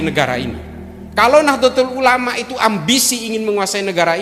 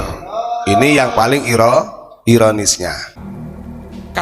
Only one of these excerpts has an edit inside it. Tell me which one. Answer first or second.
second